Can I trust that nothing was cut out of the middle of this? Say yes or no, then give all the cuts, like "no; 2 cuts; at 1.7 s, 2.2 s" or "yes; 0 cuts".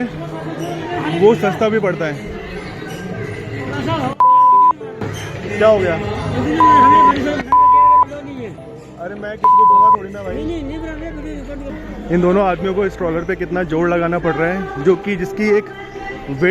no; 1 cut; at 11.8 s